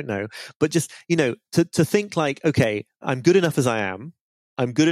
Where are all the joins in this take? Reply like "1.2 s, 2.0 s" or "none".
3.0 s